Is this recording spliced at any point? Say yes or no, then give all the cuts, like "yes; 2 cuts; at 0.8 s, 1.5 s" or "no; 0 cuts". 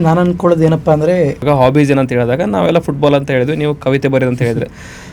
yes; 1 cut; at 1.4 s